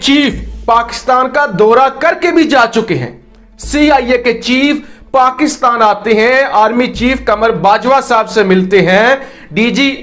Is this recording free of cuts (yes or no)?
yes